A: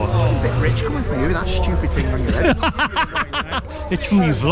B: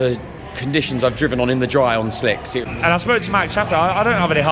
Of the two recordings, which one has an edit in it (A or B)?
B